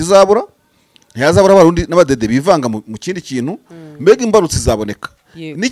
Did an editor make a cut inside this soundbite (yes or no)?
no